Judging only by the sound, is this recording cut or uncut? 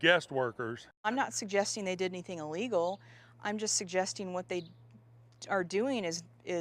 cut